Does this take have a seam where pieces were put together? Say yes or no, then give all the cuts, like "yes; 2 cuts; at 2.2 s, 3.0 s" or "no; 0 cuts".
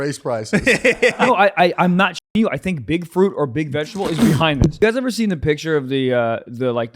yes; 2 cuts; at 1.2 s, 4.8 s